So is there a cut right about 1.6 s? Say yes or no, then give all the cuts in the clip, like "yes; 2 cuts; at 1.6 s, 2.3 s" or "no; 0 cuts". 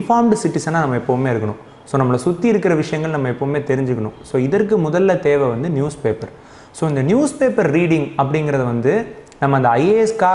no; 0 cuts